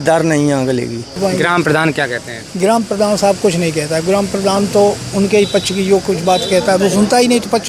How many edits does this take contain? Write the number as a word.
one